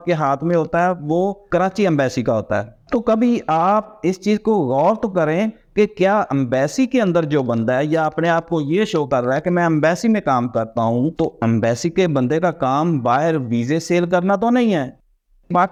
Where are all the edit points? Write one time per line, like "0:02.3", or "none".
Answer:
none